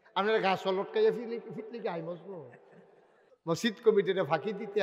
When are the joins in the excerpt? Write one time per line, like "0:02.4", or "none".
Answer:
0:03.3